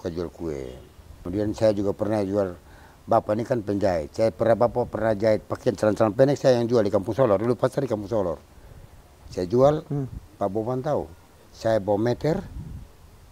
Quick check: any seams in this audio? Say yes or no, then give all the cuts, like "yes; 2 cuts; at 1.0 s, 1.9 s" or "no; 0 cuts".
yes; 1 cut; at 1.2 s